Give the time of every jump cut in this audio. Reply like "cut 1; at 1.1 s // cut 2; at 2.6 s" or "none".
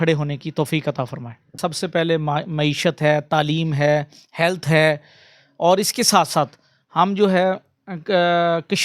cut 1; at 1.6 s